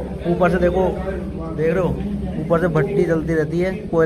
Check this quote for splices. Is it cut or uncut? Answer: uncut